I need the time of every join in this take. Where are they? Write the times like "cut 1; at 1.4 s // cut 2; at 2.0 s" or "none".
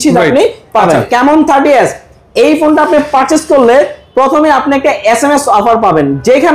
cut 1; at 1.1 s